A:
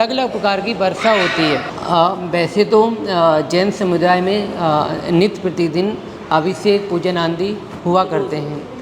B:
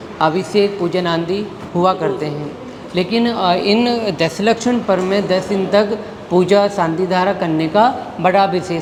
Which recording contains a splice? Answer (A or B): A